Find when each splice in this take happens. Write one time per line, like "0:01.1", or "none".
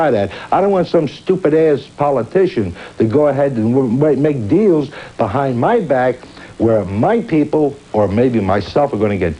0:06.9

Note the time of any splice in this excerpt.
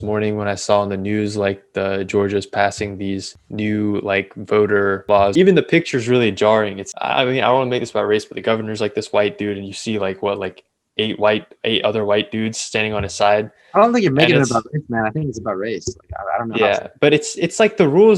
0:03.4
0:05.1
0:06.8

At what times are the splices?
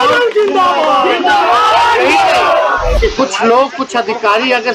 0:03.0

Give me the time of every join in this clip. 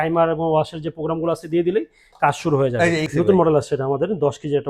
0:03.1

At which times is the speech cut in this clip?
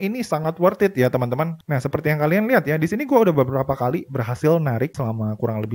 0:01.6
0:04.9

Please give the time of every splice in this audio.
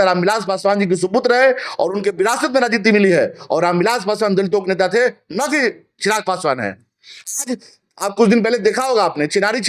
none

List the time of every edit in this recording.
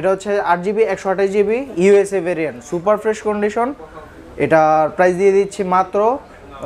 none

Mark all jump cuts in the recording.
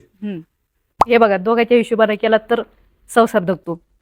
0:01.0

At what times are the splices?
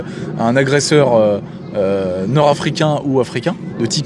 none

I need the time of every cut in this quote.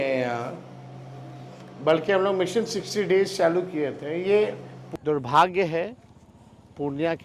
0:04.8

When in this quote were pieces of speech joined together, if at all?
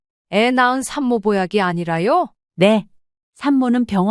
0:02.6

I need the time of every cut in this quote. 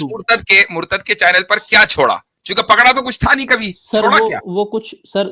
none

